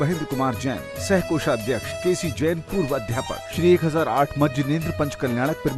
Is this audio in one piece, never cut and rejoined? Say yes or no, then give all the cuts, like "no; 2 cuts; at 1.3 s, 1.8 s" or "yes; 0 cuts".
no; 2 cuts; at 1.9 s, 3.5 s